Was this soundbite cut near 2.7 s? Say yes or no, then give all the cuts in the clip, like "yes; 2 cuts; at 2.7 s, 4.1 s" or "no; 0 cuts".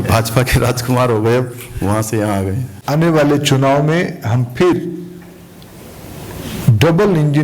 yes; 1 cut; at 2.7 s